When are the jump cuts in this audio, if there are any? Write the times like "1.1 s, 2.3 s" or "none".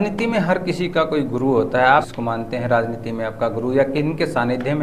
2.1 s